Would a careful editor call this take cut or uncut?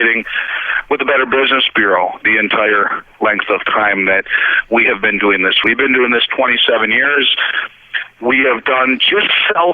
cut